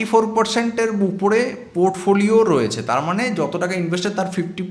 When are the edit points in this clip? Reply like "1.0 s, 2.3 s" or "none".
none